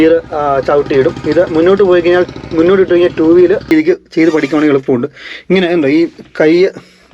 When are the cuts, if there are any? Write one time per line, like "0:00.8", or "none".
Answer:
0:03.7